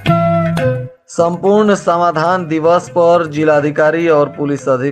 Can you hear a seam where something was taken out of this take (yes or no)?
yes